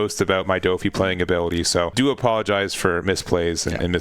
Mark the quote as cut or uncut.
cut